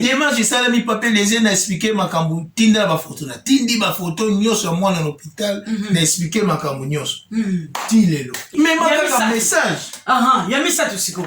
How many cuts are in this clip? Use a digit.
1